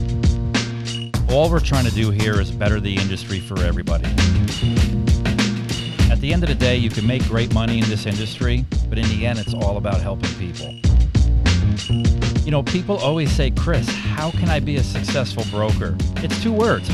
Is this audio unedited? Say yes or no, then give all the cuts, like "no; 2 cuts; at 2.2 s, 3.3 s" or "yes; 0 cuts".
yes; 0 cuts